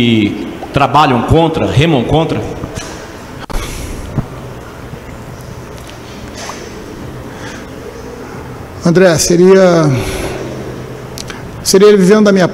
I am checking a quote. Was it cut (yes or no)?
no